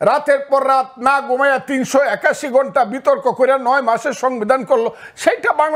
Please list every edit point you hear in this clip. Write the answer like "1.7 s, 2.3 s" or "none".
none